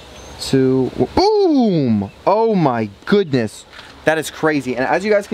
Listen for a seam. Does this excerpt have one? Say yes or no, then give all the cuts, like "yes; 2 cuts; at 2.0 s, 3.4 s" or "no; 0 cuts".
no; 0 cuts